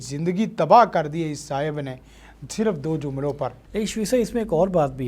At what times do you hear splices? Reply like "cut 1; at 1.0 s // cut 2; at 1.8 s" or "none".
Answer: none